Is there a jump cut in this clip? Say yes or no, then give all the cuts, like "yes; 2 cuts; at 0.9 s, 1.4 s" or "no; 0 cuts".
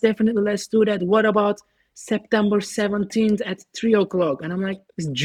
no; 0 cuts